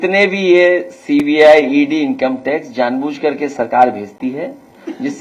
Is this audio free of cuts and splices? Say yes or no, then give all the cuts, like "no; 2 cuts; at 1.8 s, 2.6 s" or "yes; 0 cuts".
yes; 0 cuts